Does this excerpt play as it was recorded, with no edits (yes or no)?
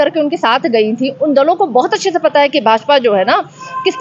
yes